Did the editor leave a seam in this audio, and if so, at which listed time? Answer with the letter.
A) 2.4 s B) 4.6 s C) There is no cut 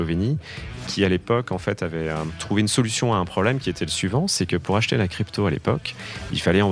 A